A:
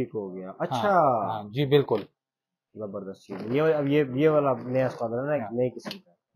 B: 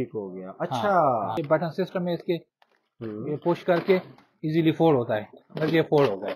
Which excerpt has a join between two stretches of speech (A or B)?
B